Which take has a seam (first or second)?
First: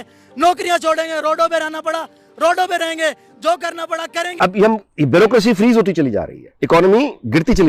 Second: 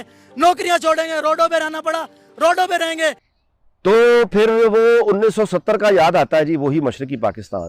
second